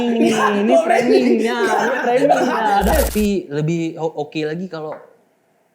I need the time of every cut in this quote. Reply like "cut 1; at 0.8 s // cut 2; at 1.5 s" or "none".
cut 1; at 3.1 s